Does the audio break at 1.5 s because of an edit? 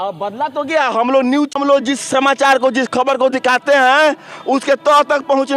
yes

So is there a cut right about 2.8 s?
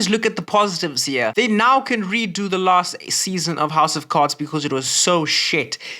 no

